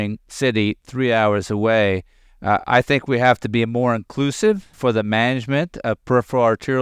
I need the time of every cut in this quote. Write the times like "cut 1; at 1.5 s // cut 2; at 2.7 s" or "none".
cut 1; at 4.7 s